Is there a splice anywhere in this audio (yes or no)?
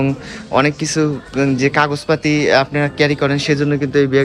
no